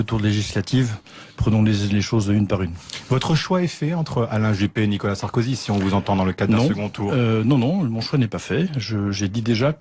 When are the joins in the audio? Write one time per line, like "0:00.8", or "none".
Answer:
0:02.2